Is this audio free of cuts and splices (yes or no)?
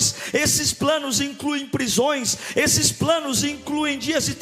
yes